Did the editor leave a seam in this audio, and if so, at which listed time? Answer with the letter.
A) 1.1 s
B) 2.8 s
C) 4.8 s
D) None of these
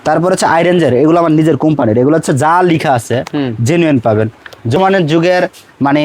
C